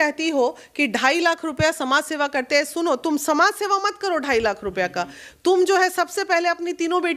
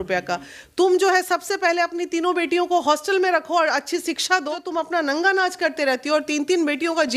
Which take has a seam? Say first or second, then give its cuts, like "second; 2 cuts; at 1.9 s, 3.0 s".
second; 1 cut; at 4.6 s